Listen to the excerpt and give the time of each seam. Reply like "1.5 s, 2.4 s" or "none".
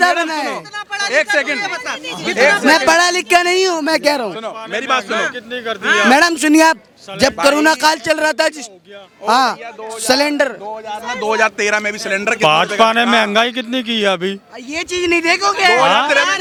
none